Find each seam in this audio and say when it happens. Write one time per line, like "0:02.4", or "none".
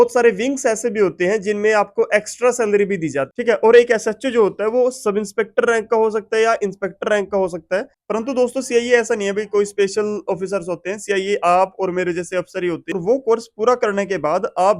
0:03.3
0:07.9
0:12.8